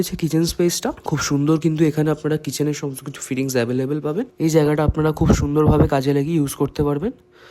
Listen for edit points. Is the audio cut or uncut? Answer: cut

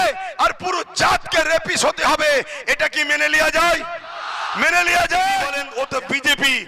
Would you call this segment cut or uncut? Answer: cut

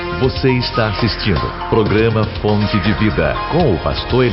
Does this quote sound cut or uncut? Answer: uncut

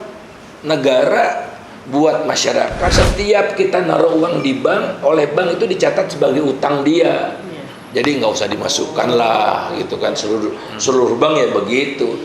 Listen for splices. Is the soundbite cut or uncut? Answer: cut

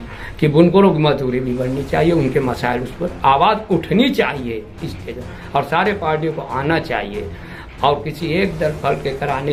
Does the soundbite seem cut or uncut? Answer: uncut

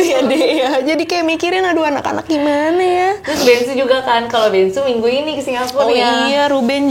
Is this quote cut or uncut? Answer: uncut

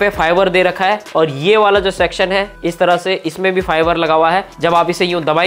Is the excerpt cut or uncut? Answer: uncut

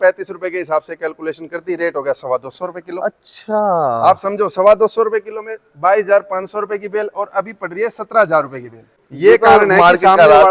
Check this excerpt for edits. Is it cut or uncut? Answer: cut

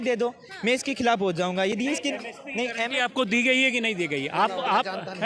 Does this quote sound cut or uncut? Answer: uncut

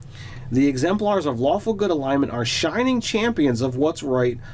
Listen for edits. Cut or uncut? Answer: uncut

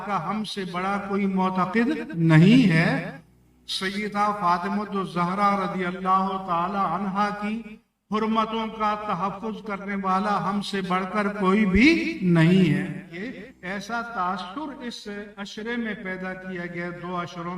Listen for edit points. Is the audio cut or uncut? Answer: cut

